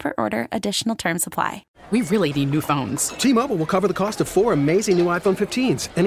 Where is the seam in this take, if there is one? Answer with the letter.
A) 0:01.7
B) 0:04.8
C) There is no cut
A